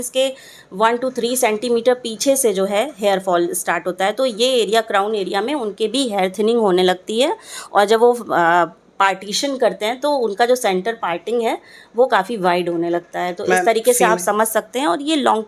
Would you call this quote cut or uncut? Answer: uncut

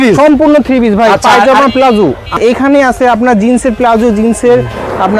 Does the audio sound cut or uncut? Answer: cut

